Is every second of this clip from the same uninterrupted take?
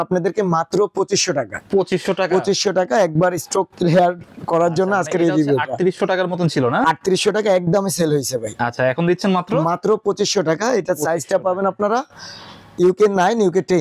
yes; 0 cuts

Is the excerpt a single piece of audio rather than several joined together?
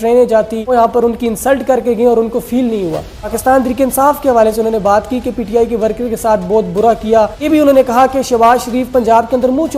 no; 3 cuts; at 0.7 s, 3.4 s, 7.5 s

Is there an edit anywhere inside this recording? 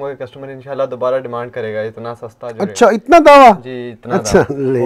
no; 0 cuts

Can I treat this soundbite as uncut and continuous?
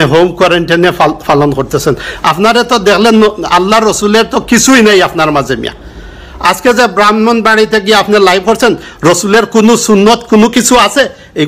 yes; 0 cuts

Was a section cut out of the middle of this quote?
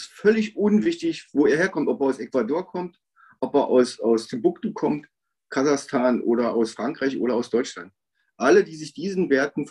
no; 0 cuts

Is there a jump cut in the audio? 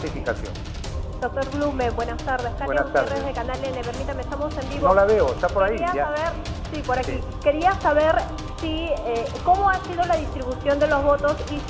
no; 0 cuts

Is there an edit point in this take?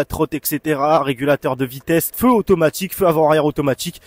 yes; 1 cut; at 2.1 s

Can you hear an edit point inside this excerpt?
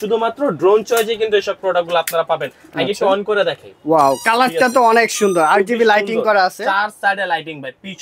no; 0 cuts

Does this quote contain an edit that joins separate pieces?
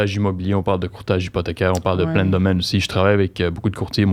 no; 0 cuts

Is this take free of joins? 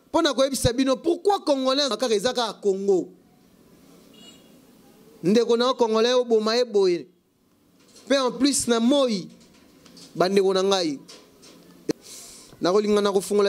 no; 2 cuts; at 1.9 s, 11.9 s

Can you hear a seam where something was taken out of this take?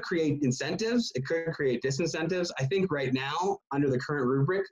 yes; 1 cut; at 3.6 s

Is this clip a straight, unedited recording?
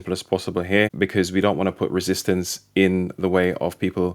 no; 1 cut; at 0.9 s

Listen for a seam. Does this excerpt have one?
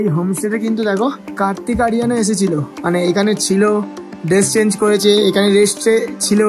yes; 1 cut; at 1.2 s

